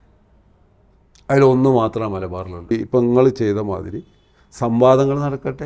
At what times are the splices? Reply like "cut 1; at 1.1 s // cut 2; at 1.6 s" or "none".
cut 1; at 2.7 s